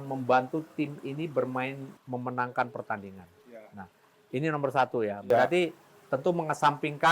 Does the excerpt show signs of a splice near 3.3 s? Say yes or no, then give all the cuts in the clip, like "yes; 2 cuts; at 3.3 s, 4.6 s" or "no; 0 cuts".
no; 1 cut; at 1.9 s